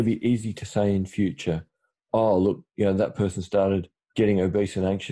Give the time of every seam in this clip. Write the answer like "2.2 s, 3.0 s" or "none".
4.0 s